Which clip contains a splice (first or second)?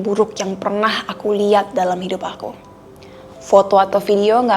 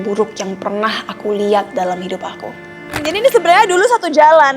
second